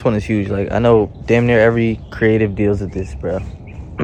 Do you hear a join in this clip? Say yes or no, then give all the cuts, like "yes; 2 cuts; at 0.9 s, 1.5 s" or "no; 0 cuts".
no; 0 cuts